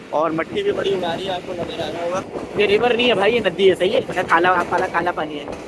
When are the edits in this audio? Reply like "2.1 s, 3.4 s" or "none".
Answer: 2.2 s